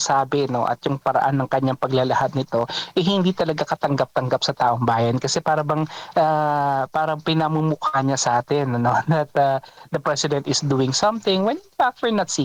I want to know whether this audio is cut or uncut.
uncut